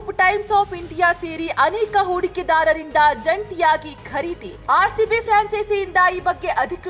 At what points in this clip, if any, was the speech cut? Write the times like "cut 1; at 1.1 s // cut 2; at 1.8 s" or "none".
none